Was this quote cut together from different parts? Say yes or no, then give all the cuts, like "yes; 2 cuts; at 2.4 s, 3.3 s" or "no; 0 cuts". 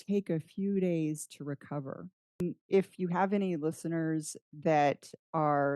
yes; 1 cut; at 2.4 s